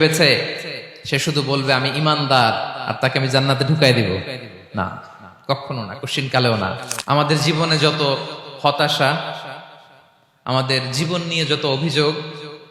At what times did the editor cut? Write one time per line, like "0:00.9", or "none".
0:06.9